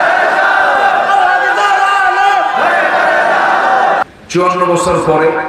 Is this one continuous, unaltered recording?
no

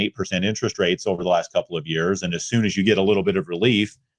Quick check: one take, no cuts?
yes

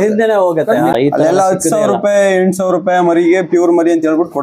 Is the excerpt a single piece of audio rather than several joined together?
no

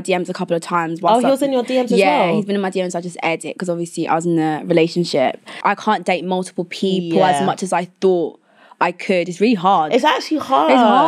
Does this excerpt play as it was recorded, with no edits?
no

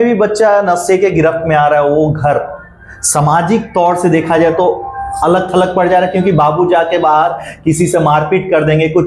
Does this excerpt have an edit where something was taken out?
no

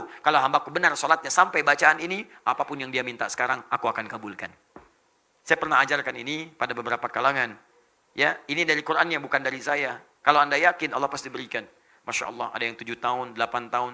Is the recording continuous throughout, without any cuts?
yes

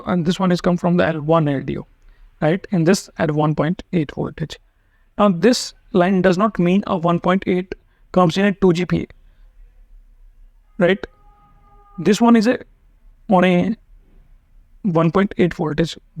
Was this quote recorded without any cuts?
yes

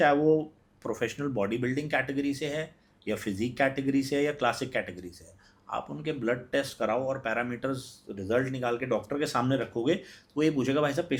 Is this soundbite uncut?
yes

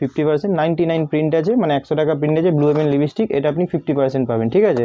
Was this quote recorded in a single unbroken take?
yes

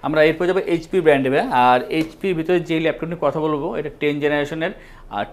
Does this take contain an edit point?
no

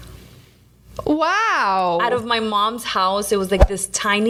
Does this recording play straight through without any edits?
yes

